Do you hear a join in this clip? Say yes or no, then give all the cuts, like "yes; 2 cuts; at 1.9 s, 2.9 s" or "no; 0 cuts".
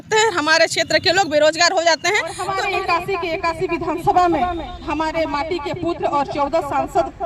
yes; 1 cut; at 2.4 s